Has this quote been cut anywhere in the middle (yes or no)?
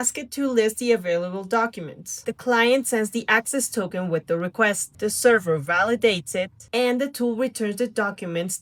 no